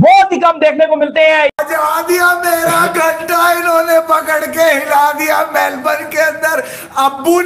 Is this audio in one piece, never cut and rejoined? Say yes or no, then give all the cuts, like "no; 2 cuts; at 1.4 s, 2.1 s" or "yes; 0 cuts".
no; 1 cut; at 1.6 s